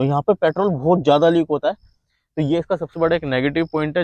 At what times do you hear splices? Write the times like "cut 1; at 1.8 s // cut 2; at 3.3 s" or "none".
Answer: cut 1; at 2.9 s